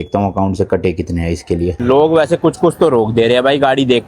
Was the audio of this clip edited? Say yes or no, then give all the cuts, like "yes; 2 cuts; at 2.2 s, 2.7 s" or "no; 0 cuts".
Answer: yes; 1 cut; at 1.8 s